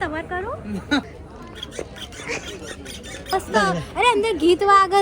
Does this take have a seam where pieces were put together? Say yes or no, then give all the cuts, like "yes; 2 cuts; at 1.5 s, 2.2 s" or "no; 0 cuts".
yes; 2 cuts; at 1.1 s, 3.3 s